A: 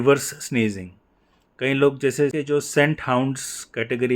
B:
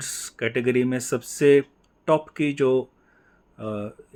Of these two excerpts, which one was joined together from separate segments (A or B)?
A